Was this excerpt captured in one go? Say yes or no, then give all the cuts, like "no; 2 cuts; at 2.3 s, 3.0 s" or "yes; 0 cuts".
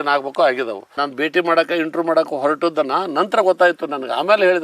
no; 1 cut; at 0.9 s